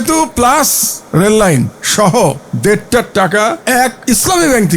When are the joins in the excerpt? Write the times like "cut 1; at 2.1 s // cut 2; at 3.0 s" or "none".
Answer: cut 1; at 1.8 s // cut 2; at 2.5 s // cut 3; at 3.8 s